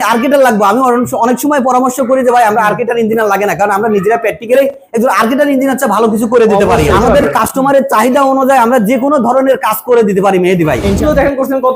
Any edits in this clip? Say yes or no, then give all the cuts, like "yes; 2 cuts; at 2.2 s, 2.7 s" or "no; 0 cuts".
yes; 2 cuts; at 6.9 s, 11.0 s